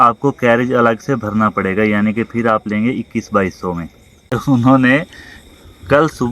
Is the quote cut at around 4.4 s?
yes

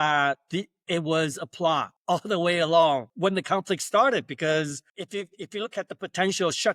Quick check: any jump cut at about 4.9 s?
yes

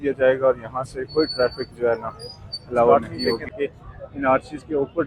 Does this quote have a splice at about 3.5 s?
yes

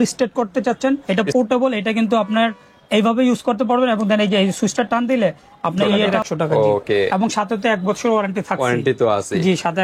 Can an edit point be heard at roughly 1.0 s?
yes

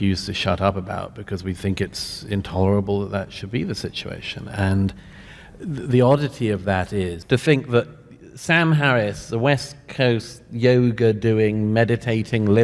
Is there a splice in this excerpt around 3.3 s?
no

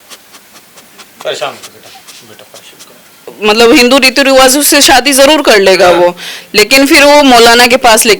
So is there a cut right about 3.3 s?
yes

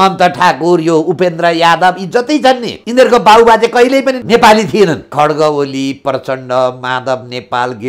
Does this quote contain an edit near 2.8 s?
yes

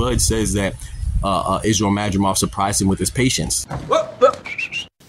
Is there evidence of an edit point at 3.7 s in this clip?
yes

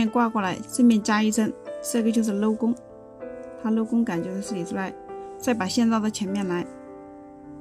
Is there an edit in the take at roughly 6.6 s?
yes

